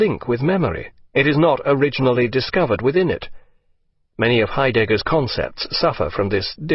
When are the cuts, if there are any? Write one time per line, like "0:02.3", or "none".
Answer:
none